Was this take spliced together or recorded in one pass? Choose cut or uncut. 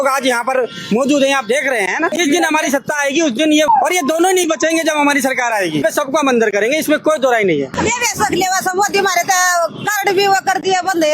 cut